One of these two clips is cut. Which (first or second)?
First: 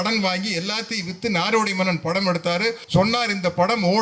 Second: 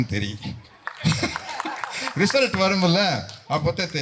first